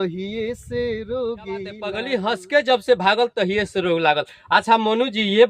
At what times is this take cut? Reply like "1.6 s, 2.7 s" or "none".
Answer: 1.9 s